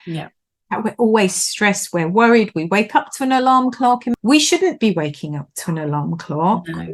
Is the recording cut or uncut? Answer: cut